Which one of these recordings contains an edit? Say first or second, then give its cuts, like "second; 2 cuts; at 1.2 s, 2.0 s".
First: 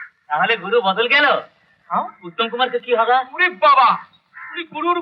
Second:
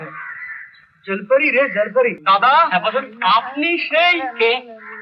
second; 1 cut; at 2.2 s